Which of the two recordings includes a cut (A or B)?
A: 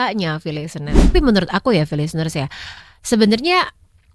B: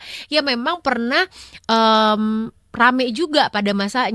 A